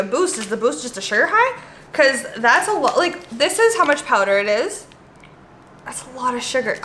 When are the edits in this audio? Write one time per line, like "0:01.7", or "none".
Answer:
none